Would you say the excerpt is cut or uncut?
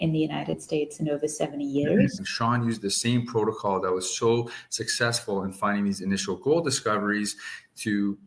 cut